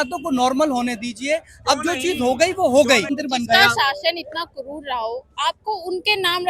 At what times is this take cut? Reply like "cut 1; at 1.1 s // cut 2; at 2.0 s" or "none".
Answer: cut 1; at 3.2 s